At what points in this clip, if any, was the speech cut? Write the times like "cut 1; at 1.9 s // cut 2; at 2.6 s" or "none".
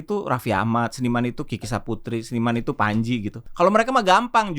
cut 1; at 3.4 s